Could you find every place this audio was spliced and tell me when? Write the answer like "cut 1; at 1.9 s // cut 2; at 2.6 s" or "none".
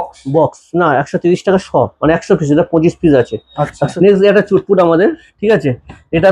cut 1; at 3.8 s

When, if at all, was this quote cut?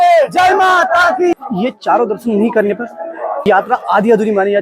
cut 1; at 1.3 s // cut 2; at 3.5 s

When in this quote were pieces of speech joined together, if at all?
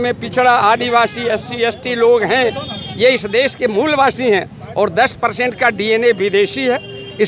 none

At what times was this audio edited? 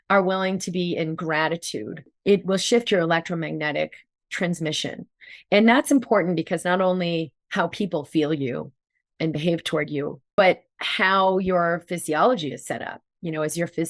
cut 1; at 2.1 s // cut 2; at 10.2 s

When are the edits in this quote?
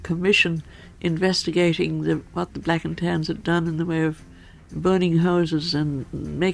cut 1; at 4.7 s

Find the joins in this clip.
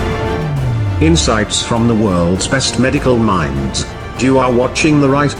none

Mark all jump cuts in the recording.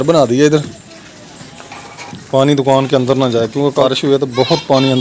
cut 1; at 3.9 s

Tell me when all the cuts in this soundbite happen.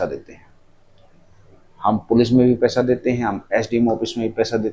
none

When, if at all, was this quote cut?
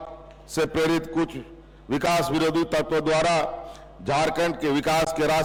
none

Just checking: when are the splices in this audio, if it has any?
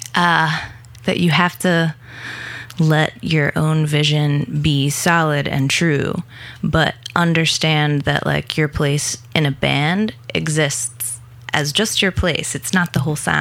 none

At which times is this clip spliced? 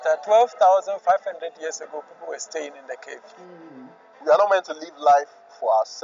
cut 1; at 3.6 s

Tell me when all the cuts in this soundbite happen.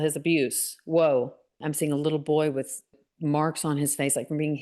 cut 1; at 1.6 s // cut 2; at 2.9 s

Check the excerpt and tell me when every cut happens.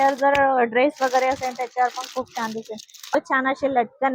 cut 1; at 3.1 s

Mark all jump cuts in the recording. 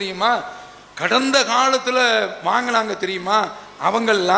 none

